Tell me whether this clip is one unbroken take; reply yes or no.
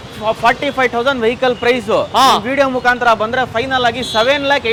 yes